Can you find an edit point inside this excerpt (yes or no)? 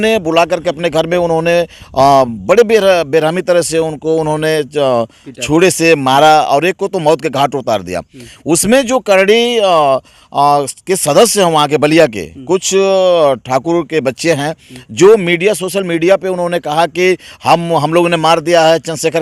no